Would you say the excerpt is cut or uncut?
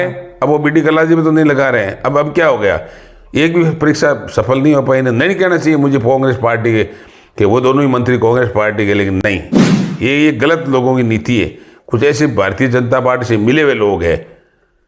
uncut